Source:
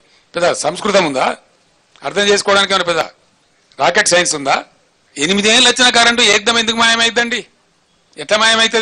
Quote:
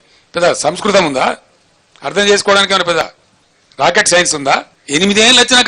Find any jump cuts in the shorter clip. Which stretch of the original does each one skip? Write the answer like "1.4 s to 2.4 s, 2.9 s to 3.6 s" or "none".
4.8 s to 5.0 s